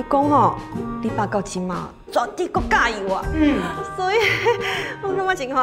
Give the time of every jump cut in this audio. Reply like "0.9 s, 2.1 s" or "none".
none